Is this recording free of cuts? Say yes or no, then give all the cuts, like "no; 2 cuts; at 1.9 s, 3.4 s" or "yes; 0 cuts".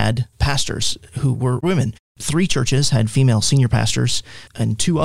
yes; 0 cuts